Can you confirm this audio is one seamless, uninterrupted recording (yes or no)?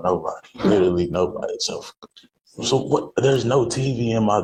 yes